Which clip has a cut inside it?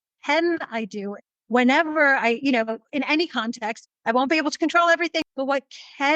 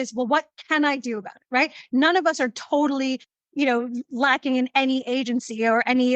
first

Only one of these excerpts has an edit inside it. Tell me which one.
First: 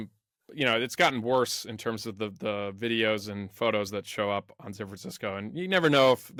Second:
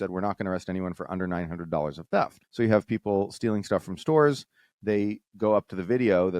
second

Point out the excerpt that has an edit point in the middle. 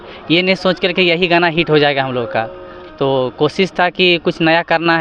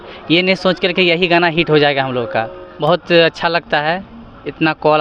second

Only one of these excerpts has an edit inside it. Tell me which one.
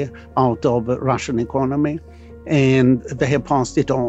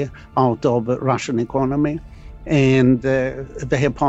first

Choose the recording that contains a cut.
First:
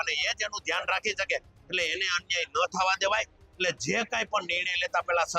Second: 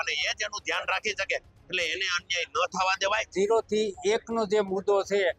second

